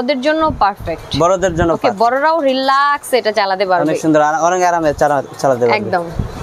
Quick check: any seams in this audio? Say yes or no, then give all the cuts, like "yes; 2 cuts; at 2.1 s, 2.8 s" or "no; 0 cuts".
no; 0 cuts